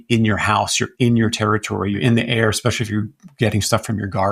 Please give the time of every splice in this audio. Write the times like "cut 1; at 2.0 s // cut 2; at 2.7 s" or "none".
cut 1; at 2.0 s